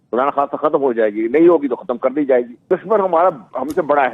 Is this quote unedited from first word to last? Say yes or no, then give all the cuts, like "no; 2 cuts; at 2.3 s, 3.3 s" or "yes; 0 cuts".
no; 1 cut; at 2.5 s